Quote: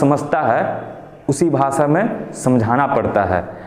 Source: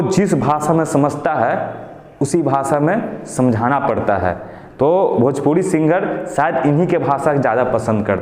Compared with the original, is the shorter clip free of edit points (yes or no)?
yes